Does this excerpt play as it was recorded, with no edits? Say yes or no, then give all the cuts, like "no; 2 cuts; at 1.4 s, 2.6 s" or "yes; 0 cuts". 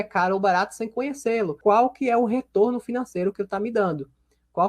no; 1 cut; at 1.5 s